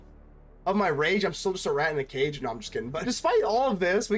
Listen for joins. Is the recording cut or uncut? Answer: cut